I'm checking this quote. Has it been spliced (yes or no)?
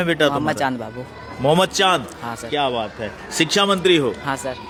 no